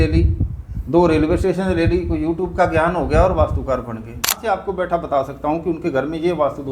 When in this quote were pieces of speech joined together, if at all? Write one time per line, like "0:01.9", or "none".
0:04.4